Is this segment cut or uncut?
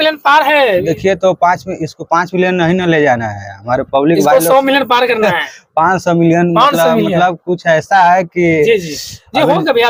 uncut